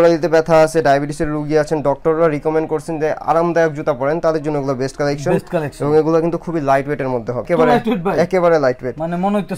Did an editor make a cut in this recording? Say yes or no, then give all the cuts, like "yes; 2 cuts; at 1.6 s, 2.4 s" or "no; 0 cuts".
no; 0 cuts